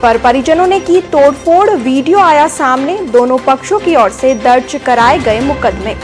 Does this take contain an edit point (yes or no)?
no